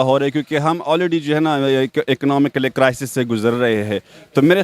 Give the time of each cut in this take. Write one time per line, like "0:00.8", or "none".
none